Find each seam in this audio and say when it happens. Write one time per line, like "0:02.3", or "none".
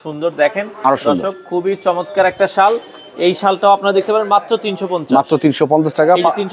none